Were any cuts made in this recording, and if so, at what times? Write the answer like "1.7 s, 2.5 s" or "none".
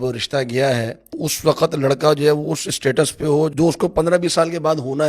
1.0 s

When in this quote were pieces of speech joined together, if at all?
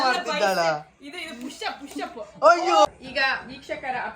3.0 s

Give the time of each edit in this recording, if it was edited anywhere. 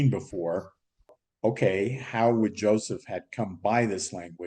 1.1 s

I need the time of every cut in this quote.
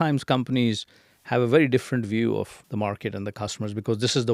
2.6 s

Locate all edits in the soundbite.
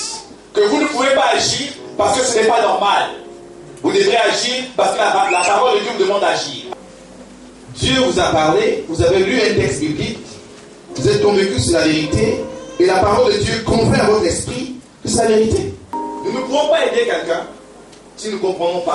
6.6 s, 15.9 s

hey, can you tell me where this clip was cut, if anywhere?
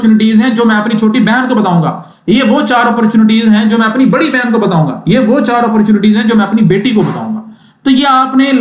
none

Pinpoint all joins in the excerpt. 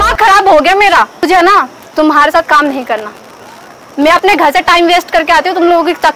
1.2 s

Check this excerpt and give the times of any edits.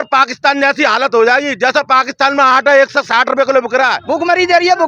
4.0 s

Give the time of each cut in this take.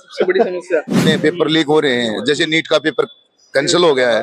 1.0 s

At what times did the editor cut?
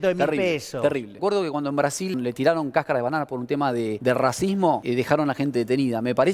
1.1 s, 2.1 s, 4.0 s, 4.8 s

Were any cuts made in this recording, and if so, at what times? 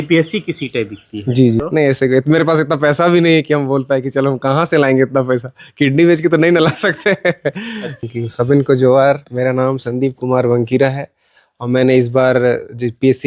1.6 s, 8.0 s

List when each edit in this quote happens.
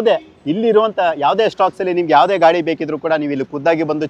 none

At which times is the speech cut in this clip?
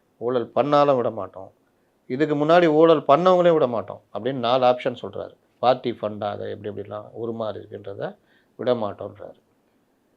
5.4 s

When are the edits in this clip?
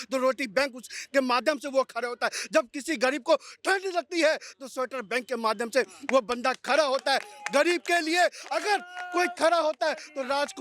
none

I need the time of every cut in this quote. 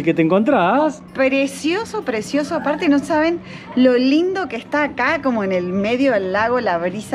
none

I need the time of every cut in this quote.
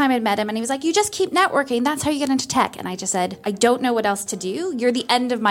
3.4 s

